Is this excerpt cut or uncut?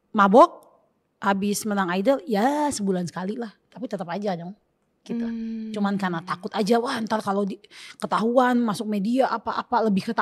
uncut